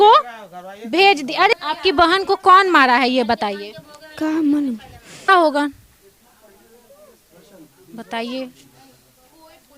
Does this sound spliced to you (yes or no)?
yes